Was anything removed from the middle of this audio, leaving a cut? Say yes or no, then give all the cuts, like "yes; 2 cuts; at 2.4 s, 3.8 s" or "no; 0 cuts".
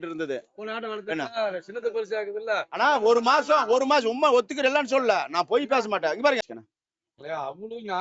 yes; 1 cut; at 6.6 s